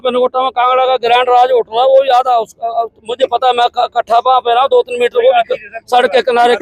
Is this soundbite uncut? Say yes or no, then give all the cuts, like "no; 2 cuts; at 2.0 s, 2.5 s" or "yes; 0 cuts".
yes; 0 cuts